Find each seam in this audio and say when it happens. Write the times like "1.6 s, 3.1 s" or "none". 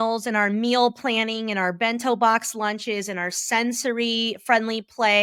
none